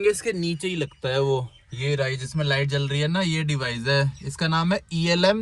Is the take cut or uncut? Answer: uncut